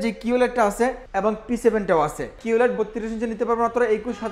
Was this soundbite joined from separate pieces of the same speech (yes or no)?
yes